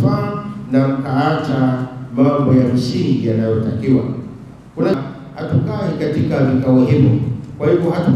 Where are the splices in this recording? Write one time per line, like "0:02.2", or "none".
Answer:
0:04.9

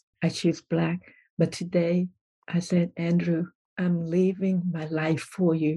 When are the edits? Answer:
none

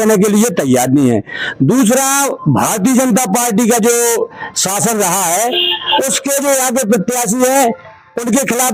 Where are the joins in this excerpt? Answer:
none

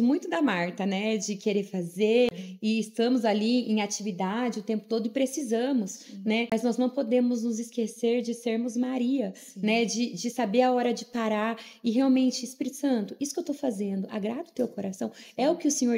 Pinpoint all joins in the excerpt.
0:02.3
0:06.5

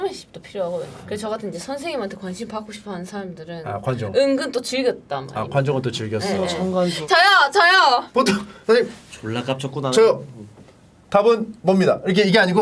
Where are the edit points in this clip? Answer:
0:00.9
0:07.0

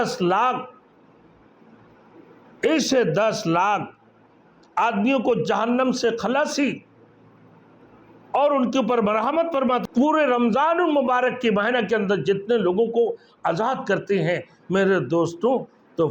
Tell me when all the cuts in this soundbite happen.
0:09.8

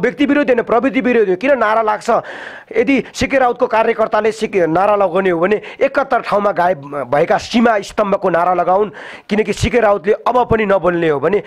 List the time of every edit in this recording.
none

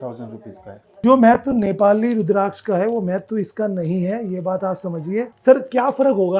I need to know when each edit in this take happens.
0:01.0
0:05.3

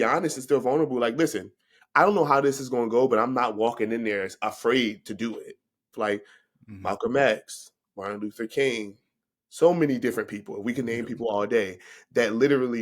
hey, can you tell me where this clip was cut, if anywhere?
0:05.9

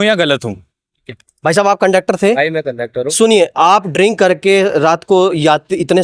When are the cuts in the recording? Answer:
none

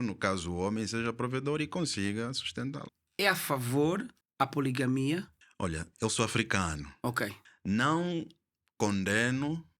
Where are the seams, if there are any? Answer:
0:02.9
0:07.4

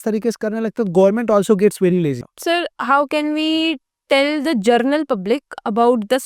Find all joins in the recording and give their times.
0:02.3

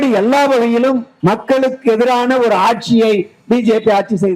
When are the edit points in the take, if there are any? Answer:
0:01.1

